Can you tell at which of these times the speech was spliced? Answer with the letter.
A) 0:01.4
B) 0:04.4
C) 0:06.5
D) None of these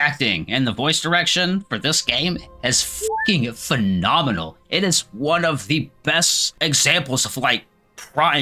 D